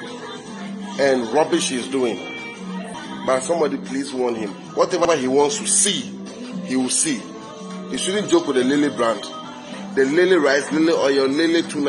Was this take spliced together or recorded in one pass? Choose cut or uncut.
cut